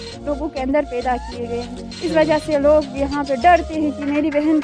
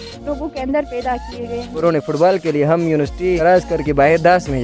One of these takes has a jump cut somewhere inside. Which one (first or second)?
second